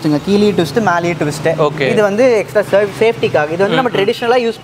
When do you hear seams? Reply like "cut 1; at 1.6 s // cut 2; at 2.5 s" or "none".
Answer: none